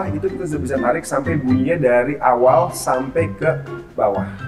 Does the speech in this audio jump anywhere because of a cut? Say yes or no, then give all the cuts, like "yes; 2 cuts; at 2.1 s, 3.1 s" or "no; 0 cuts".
no; 0 cuts